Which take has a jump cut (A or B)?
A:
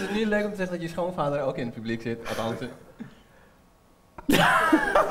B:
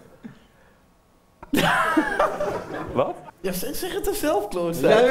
B